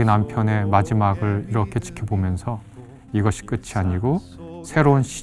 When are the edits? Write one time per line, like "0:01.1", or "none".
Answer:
none